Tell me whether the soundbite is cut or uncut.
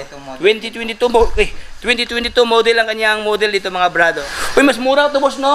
cut